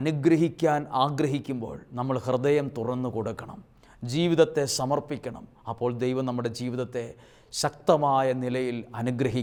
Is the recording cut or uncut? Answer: uncut